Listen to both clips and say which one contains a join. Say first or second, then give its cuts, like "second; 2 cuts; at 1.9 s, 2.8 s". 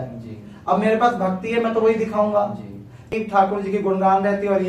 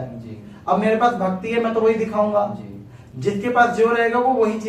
first; 1 cut; at 3.2 s